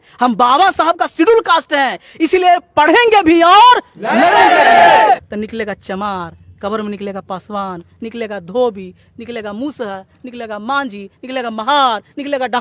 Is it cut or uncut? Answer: cut